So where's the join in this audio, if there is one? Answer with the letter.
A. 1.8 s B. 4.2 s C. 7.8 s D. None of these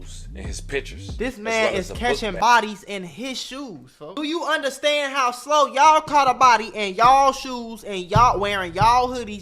B